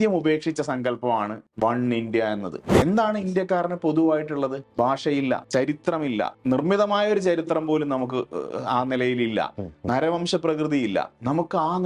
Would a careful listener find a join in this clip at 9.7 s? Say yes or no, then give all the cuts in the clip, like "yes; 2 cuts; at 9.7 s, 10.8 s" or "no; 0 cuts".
no; 5 cuts; at 1.4 s, 2.6 s, 4.6 s, 5.5 s, 6.4 s